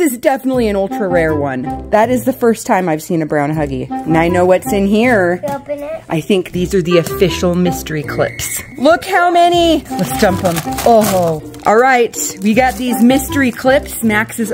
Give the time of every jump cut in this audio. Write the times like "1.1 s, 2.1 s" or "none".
1.8 s, 3.8 s, 8.6 s, 9.9 s, 11.5 s